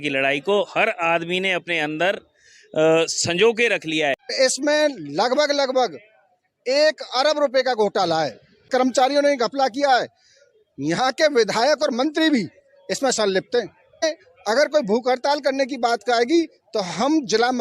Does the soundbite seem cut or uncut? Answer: cut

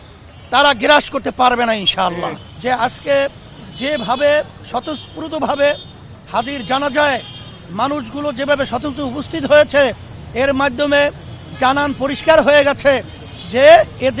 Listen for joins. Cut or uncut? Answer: cut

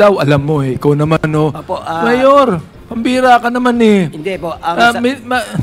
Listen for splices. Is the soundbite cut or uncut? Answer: uncut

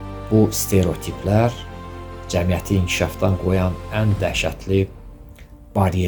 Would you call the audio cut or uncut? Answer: uncut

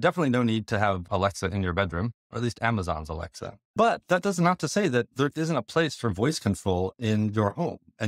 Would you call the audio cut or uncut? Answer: cut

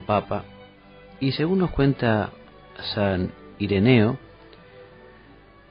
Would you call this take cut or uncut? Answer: cut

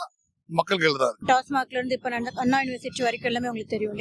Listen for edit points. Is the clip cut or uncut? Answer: cut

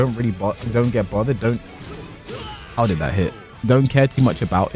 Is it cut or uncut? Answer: uncut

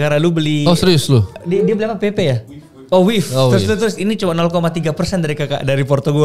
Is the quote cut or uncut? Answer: cut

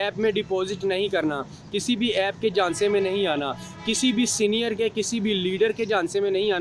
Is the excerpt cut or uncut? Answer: uncut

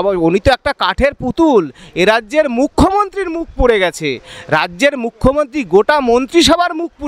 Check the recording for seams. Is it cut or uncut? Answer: uncut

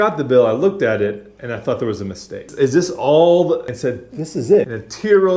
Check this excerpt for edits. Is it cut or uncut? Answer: uncut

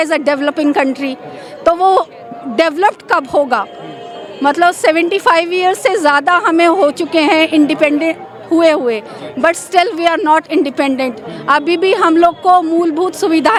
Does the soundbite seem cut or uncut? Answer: uncut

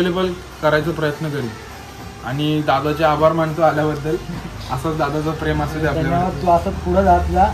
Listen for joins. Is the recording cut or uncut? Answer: uncut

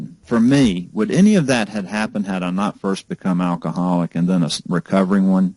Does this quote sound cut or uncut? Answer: uncut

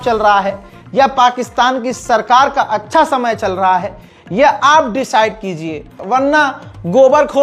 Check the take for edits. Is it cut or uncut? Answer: uncut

